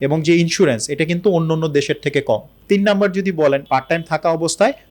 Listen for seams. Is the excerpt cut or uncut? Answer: cut